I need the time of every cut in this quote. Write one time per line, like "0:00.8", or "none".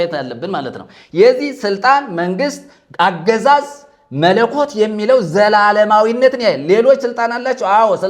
none